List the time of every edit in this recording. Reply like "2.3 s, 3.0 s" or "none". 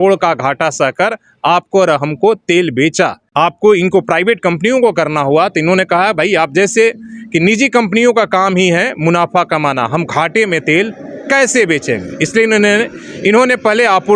3.2 s

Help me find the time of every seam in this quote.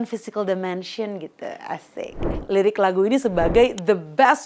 2.3 s

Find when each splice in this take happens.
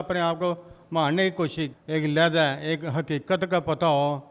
1.8 s

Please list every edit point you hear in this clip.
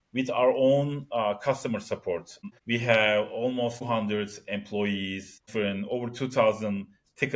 5.5 s

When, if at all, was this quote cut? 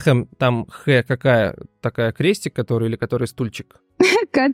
none

